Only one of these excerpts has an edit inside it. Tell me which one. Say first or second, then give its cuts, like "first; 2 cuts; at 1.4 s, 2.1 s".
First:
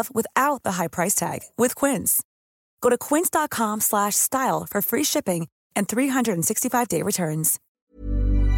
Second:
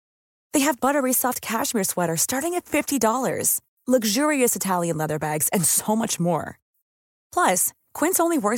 first; 1 cut; at 7.6 s